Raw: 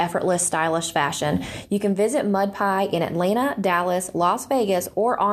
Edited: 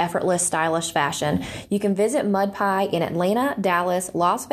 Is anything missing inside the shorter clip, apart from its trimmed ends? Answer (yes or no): no